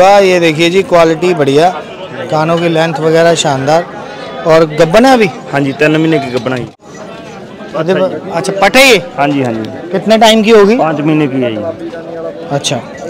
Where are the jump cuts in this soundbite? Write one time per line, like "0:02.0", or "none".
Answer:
0:06.8